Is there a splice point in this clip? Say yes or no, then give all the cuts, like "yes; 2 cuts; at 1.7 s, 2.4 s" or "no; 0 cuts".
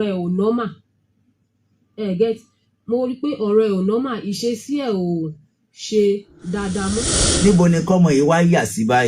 yes; 1 cut; at 7.1 s